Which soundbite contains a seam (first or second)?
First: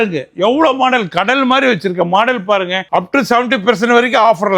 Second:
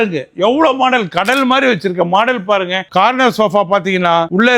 second